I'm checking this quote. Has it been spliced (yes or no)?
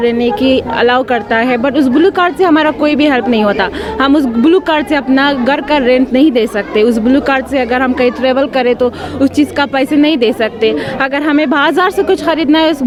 no